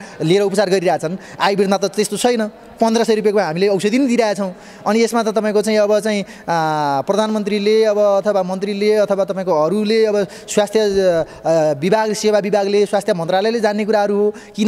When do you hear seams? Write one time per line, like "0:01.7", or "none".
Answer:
none